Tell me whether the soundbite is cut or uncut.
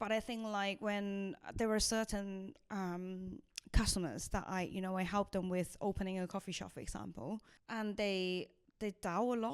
cut